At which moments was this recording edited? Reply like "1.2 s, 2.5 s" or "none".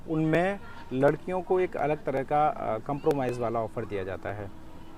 none